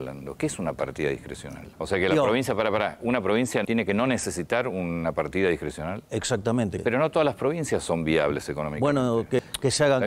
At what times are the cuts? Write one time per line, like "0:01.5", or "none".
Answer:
0:01.7
0:03.6
0:06.8
0:09.4